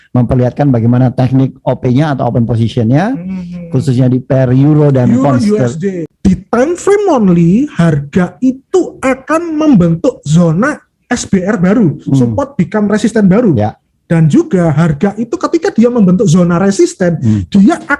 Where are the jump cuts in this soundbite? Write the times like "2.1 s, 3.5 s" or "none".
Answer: 6.0 s